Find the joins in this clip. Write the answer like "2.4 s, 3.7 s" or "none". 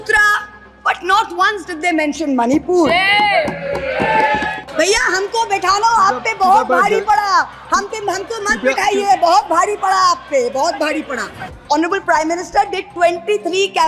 4.5 s, 11.5 s